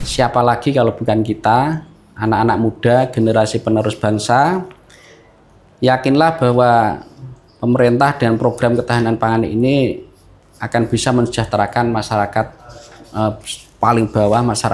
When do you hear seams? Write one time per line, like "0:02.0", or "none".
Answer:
none